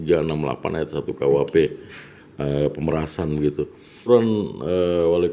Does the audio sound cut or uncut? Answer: cut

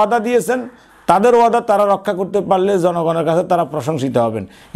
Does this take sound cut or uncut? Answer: uncut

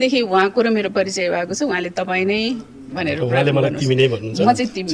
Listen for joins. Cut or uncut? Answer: uncut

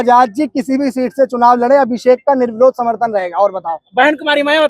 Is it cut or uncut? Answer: uncut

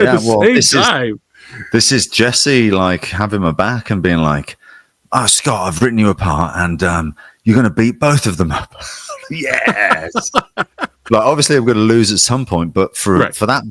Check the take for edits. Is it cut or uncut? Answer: uncut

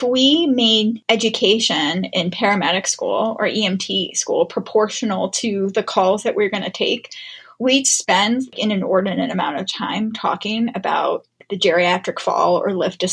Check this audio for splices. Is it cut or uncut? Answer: cut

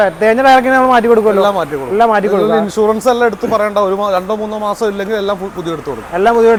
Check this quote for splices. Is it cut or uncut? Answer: uncut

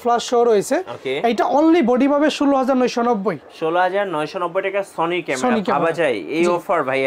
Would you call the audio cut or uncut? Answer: uncut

